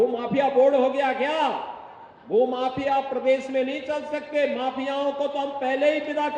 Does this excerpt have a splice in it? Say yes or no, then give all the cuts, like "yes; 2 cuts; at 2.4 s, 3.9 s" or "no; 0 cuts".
no; 0 cuts